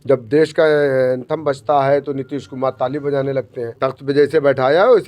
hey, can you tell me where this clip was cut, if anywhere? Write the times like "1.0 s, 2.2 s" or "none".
3.6 s